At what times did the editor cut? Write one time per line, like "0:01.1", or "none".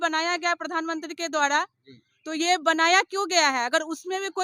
none